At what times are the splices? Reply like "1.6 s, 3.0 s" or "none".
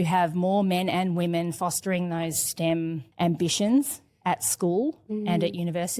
none